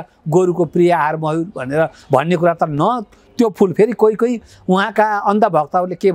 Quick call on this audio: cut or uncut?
uncut